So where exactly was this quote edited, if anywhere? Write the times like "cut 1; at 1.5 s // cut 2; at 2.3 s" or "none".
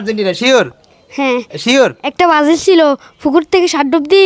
none

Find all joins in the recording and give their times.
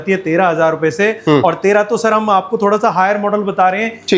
none

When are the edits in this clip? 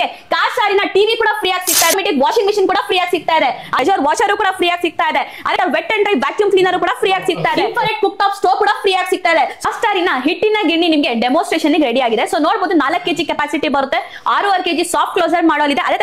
cut 1; at 1.9 s // cut 2; at 3.8 s // cut 3; at 5.6 s // cut 4; at 7.6 s // cut 5; at 9.6 s

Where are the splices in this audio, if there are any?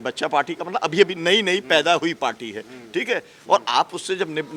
none

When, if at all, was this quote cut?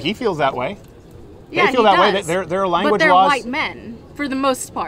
none

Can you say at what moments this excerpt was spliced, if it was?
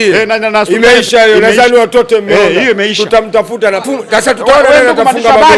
cut 1; at 3.8 s

